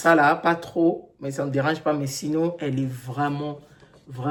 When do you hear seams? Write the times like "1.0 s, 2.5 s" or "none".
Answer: none